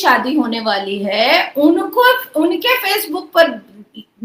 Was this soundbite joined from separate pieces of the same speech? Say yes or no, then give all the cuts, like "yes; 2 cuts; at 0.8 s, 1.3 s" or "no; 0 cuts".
no; 0 cuts